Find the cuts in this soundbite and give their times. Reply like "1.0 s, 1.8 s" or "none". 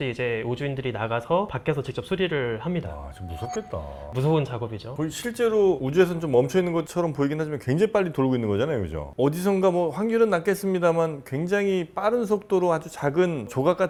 none